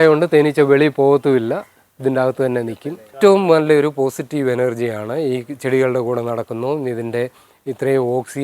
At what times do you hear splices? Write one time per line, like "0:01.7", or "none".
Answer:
0:03.1